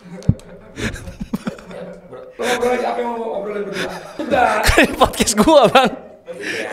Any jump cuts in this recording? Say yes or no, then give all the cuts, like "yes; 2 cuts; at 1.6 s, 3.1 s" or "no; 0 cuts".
yes; 2 cuts; at 2.2 s, 4.2 s